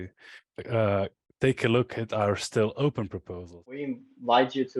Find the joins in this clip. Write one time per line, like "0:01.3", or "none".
0:03.8